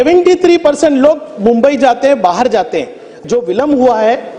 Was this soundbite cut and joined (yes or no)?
yes